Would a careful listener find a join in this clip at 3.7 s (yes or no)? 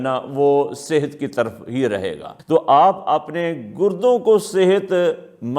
no